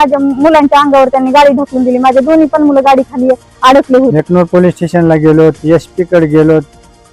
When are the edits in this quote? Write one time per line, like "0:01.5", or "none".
0:04.1